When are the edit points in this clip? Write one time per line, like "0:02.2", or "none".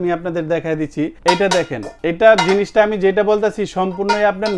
0:01.2
0:01.8